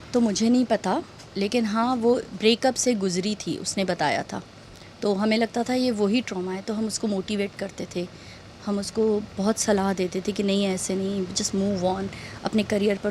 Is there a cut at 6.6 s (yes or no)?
no